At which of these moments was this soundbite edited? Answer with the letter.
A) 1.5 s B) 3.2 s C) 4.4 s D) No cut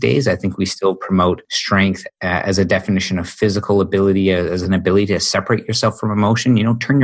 A